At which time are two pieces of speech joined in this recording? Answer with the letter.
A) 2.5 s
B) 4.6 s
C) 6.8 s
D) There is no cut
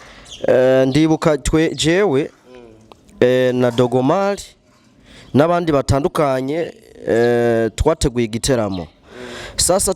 D